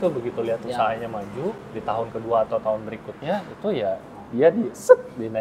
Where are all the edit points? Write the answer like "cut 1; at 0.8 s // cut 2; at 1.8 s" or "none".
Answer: cut 1; at 1.7 s